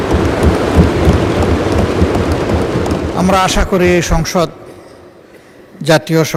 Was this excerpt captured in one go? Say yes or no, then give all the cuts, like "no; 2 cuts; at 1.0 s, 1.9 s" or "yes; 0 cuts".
yes; 0 cuts